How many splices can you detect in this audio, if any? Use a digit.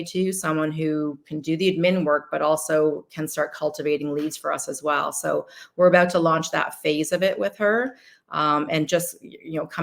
0